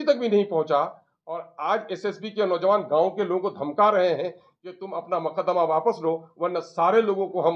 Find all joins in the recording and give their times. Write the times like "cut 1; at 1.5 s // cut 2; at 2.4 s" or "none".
none